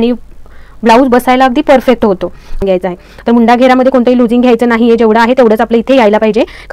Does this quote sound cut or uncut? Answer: cut